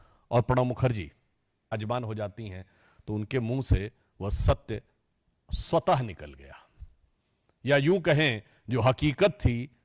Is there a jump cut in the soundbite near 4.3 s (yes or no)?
no